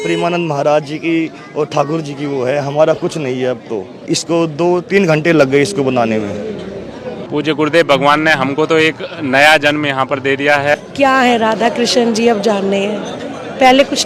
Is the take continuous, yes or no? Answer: no